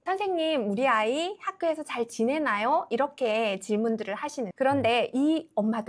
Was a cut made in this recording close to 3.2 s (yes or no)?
no